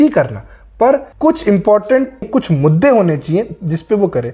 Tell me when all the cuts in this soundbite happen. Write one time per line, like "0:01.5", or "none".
0:01.1
0:02.3